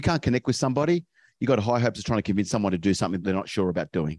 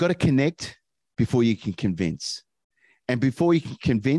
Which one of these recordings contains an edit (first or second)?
first